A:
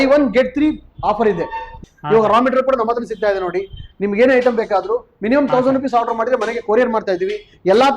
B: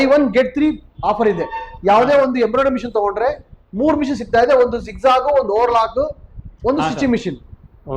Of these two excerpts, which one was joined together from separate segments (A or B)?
A